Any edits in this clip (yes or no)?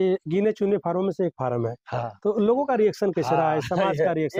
no